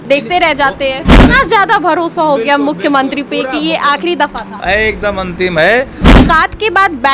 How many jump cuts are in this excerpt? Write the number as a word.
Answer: two